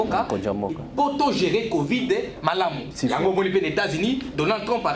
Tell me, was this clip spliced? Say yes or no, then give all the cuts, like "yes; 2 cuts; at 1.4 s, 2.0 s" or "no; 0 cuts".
yes; 1 cut; at 2.9 s